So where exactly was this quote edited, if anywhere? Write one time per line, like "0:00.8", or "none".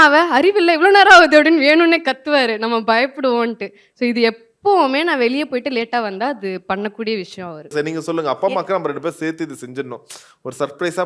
0:07.7